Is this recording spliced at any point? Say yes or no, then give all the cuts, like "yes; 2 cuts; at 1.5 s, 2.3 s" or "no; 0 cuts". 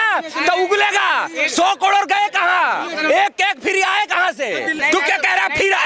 yes; 1 cut; at 4.8 s